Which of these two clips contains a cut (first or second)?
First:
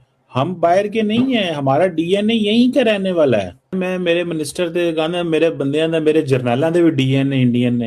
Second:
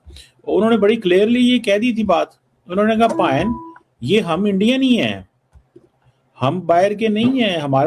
first